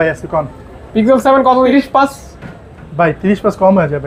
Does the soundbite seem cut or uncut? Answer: uncut